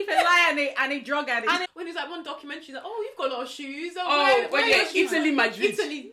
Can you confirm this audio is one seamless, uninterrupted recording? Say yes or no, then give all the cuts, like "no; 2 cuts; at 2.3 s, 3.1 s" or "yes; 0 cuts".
no; 1 cut; at 1.6 s